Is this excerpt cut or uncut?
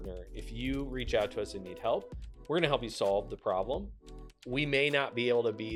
uncut